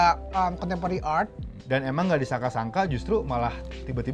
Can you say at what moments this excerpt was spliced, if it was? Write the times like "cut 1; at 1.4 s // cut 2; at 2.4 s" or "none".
cut 1; at 1.6 s